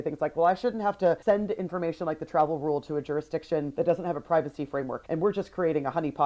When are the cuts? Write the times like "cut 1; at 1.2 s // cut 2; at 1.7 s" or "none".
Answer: cut 1; at 1.2 s